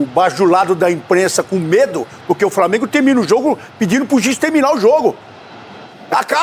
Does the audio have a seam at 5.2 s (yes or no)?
no